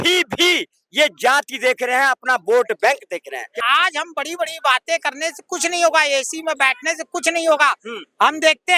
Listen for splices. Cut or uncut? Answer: cut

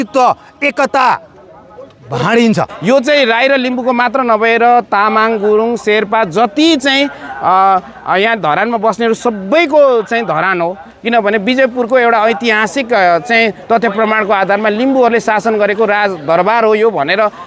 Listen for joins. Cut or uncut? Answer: cut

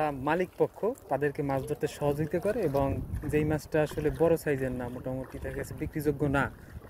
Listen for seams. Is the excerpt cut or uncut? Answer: cut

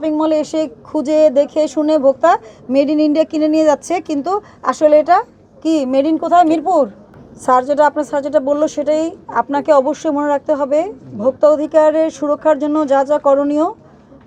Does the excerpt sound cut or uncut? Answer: uncut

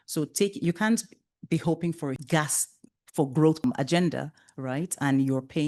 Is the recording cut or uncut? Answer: cut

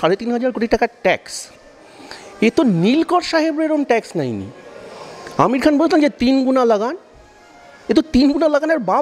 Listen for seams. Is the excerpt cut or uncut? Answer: uncut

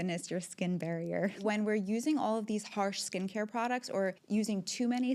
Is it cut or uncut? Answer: cut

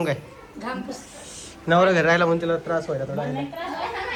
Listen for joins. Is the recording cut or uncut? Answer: uncut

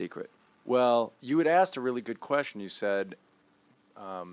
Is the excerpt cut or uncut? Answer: uncut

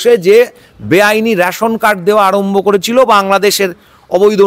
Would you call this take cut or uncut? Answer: uncut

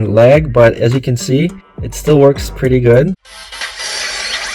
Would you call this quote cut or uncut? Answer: cut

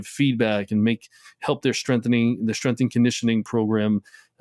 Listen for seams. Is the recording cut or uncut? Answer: uncut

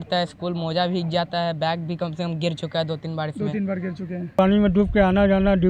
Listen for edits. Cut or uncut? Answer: cut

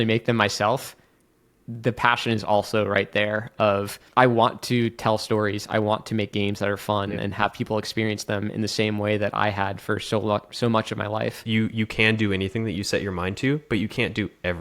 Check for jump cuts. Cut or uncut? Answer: cut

